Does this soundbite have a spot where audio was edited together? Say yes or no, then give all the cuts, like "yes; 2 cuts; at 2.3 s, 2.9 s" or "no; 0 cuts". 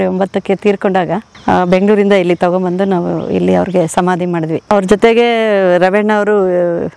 yes; 2 cuts; at 1.3 s, 4.6 s